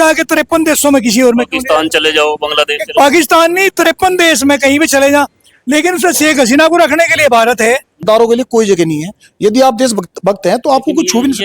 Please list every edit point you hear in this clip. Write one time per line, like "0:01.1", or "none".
0:08.0

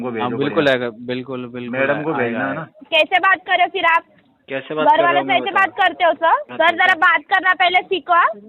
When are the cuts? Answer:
0:02.7
0:06.5

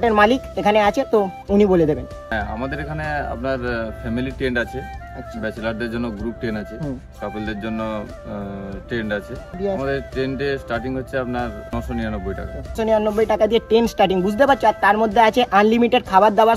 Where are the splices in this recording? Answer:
0:02.2
0:09.5
0:12.8

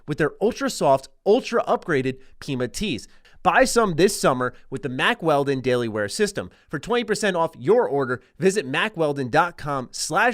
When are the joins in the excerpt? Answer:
0:03.2

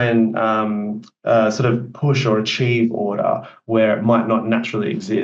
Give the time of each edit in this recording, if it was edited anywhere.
none

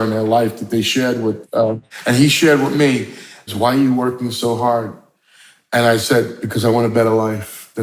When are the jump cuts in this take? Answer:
0:01.9
0:03.4

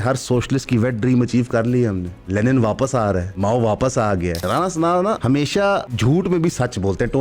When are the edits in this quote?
0:02.1
0:03.3
0:04.4
0:05.6

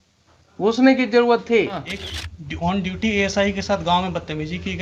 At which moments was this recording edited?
0:01.9

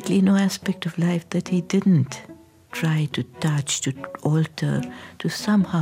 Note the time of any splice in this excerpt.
none

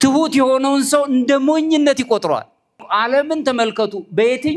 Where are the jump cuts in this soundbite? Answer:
0:02.8

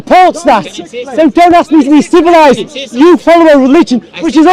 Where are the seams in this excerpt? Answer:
none

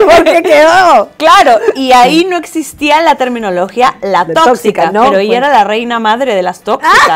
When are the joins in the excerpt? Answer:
none

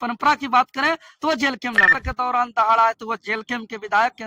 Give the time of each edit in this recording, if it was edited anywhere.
0:02.0

